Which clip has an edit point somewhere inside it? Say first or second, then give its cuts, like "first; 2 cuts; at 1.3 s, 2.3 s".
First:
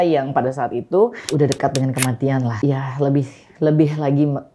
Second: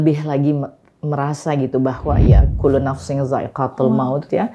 first; 2 cuts; at 1.3 s, 2.5 s